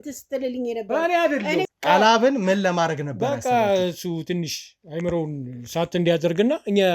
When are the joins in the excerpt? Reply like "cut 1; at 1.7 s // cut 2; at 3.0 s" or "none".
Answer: cut 1; at 1.7 s

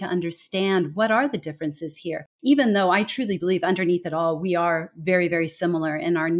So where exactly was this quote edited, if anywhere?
cut 1; at 2.2 s

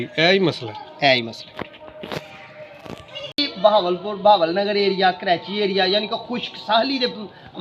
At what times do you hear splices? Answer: cut 1; at 3.5 s

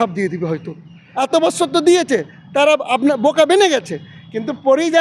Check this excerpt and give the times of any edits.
cut 1; at 1.0 s

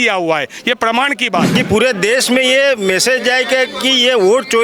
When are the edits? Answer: cut 1; at 1.5 s

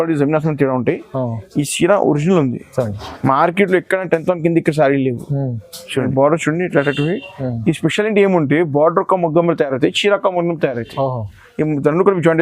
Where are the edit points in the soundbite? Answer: cut 1; at 6.1 s

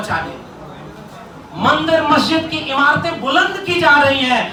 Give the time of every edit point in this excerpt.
none

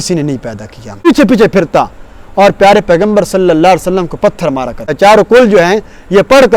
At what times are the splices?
cut 1; at 1.1 s // cut 2; at 4.9 s

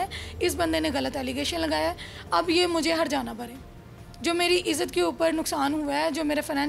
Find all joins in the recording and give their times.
none

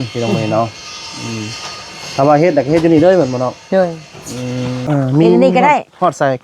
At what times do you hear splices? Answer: cut 1; at 4.8 s

